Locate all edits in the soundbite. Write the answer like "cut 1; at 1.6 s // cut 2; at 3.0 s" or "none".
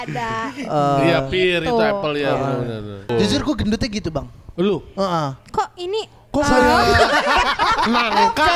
cut 1; at 3.1 s